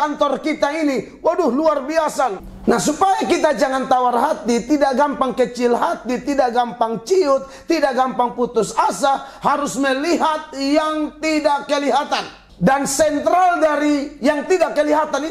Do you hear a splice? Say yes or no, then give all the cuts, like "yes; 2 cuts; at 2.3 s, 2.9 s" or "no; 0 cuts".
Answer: yes; 2 cuts; at 2.5 s, 12.4 s